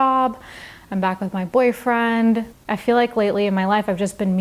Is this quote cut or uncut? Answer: cut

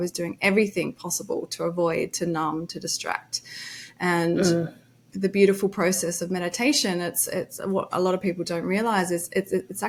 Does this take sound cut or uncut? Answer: uncut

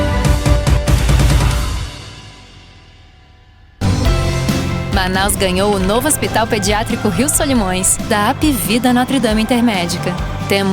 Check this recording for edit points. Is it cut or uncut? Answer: cut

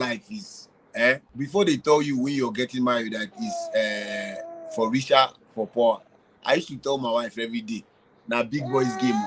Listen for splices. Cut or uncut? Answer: cut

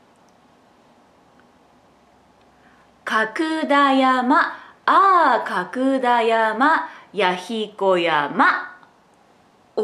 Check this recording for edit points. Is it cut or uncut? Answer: uncut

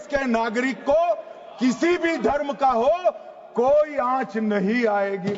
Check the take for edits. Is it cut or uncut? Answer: uncut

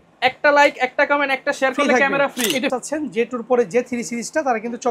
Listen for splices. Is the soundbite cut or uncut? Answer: cut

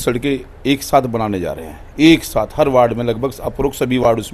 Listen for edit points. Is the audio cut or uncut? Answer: uncut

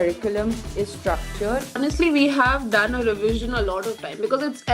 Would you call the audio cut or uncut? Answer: cut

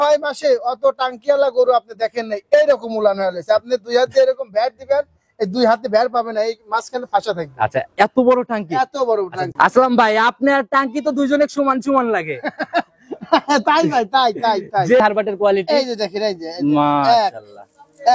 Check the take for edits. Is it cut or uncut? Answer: cut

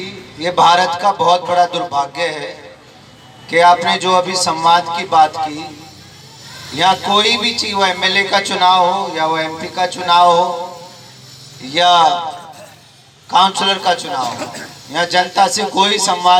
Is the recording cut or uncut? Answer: uncut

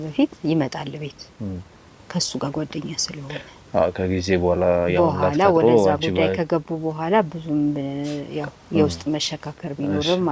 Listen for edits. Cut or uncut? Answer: uncut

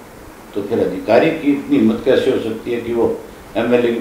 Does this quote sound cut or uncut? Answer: uncut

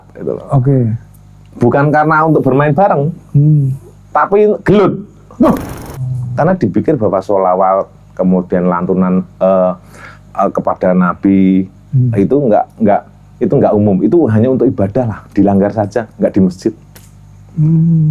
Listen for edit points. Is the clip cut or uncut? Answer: cut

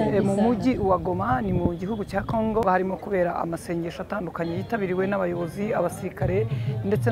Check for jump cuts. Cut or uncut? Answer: cut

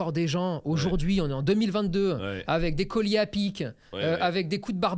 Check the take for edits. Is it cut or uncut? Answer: uncut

